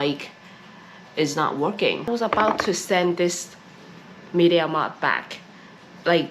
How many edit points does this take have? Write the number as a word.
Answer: one